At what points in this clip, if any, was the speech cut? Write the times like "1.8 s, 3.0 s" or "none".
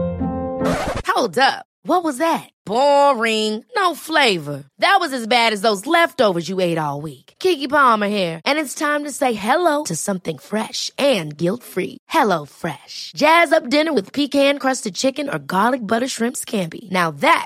none